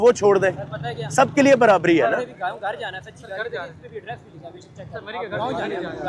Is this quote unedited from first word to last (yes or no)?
yes